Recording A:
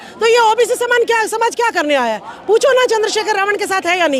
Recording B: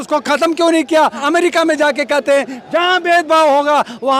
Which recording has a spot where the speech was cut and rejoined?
B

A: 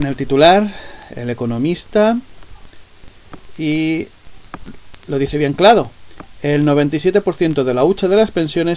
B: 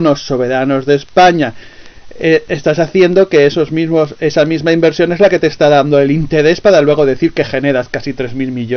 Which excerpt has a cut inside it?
A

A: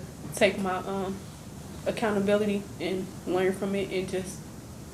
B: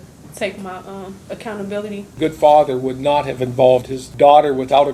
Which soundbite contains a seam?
B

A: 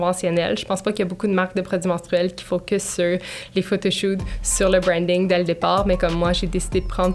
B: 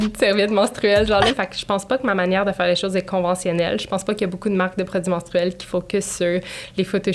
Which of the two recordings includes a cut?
B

